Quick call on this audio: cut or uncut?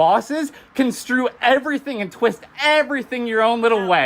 uncut